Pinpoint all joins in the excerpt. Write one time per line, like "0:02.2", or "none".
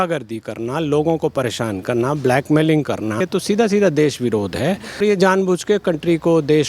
0:03.2
0:05.0